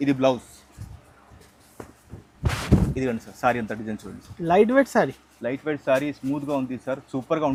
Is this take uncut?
yes; 0 cuts

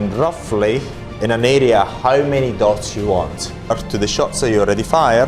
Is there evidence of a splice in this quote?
yes; 1 cut; at 3.7 s

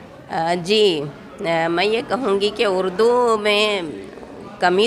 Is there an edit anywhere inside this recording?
no; 0 cuts

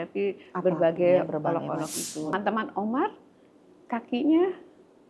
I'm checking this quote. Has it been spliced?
yes; 1 cut; at 2.3 s

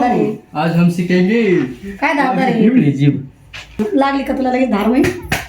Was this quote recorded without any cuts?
no; 1 cut; at 3.6 s

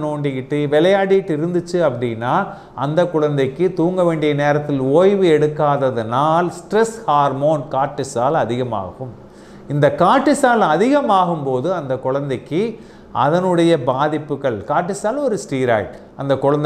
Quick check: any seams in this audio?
no; 0 cuts

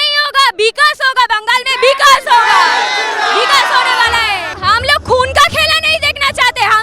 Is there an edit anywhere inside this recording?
yes; 1 cut; at 4.5 s

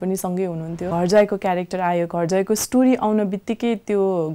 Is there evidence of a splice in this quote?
yes; 1 cut; at 0.9 s

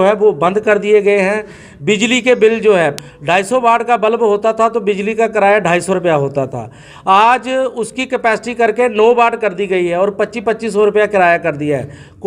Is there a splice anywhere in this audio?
yes; 1 cut; at 2.9 s

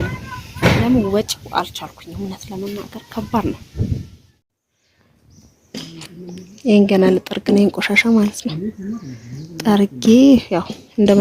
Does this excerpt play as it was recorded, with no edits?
no; 1 cut; at 4.5 s

